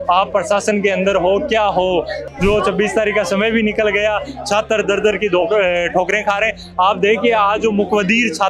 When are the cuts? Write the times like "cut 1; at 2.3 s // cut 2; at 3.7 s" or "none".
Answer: cut 1; at 2.2 s